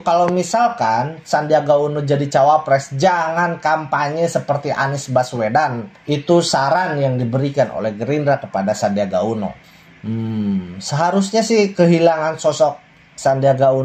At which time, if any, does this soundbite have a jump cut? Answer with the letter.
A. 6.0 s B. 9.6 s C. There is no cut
B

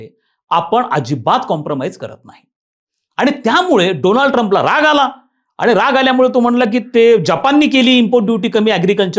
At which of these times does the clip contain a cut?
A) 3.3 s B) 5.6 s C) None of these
C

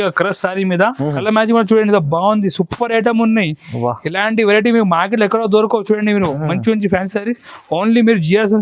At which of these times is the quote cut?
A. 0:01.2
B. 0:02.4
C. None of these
A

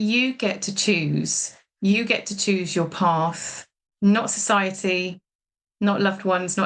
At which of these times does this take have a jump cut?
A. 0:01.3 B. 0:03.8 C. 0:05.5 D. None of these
B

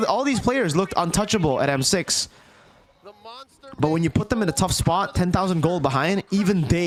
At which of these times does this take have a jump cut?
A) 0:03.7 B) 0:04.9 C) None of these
C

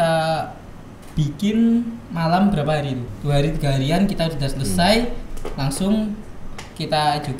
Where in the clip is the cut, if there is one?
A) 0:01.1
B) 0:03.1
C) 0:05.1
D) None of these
B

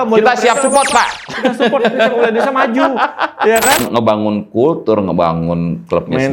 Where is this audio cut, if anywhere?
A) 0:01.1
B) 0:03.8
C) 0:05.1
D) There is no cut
B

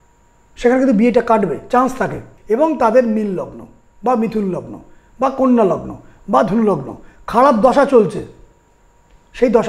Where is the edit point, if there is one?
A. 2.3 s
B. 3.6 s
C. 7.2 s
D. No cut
A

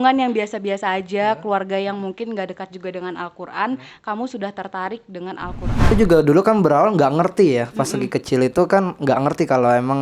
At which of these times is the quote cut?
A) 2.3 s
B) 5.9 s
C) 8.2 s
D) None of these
B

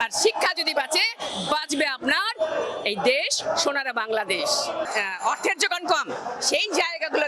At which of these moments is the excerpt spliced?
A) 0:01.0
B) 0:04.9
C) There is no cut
B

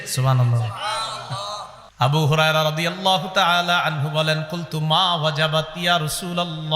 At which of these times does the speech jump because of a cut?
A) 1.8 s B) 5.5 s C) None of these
A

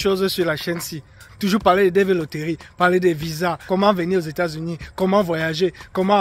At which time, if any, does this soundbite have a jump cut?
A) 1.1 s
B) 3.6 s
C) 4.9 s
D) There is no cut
B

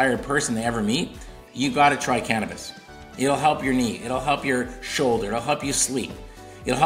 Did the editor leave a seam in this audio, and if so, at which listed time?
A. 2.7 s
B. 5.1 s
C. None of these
C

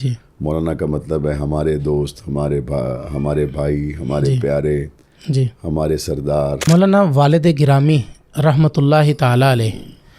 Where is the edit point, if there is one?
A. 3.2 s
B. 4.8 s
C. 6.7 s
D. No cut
C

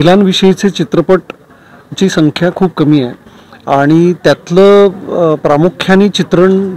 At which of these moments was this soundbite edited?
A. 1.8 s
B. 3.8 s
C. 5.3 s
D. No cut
D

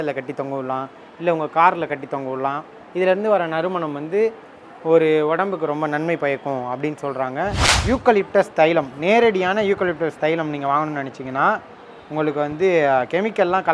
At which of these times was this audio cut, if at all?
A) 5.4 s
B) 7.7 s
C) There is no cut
B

